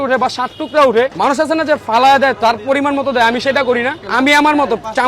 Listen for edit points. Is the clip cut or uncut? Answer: cut